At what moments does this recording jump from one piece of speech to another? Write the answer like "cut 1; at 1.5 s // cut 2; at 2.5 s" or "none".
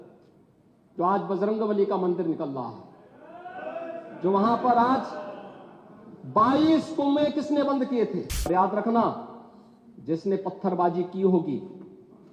cut 1; at 8.5 s